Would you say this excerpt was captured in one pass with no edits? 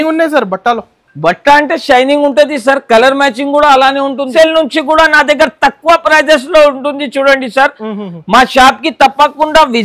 no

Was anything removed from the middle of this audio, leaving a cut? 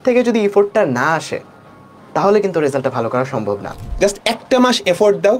yes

